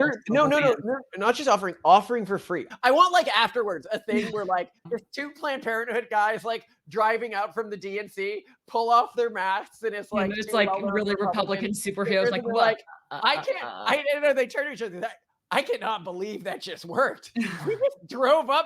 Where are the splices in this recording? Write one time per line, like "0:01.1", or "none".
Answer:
0:02.6
0:04.8